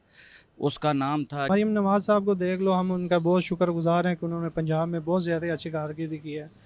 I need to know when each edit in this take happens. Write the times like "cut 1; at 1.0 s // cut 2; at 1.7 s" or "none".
cut 1; at 1.5 s